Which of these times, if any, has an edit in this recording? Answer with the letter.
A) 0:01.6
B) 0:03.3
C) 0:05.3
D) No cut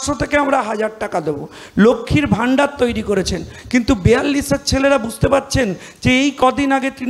D